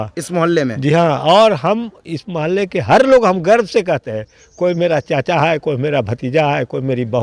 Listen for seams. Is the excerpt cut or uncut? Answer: uncut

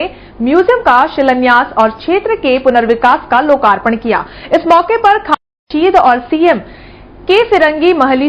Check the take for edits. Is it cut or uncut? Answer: cut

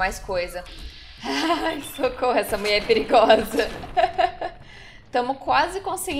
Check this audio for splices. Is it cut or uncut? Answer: uncut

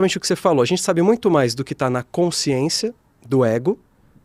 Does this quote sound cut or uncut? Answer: uncut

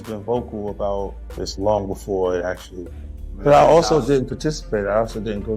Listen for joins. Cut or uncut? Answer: cut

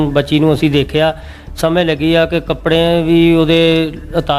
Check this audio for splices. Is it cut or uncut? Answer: uncut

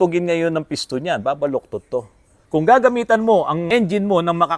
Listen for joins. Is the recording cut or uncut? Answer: cut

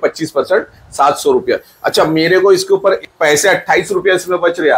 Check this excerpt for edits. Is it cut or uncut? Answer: cut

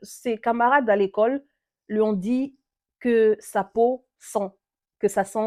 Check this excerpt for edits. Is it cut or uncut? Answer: uncut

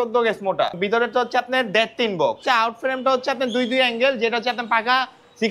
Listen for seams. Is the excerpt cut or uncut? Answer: cut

